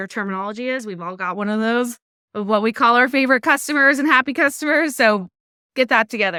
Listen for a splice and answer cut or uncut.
uncut